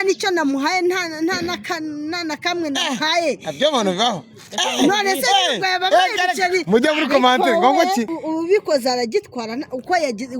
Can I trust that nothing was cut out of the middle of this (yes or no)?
no